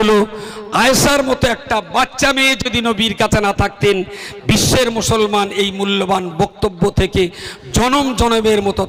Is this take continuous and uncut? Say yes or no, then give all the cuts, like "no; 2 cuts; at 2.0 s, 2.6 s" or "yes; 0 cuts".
yes; 0 cuts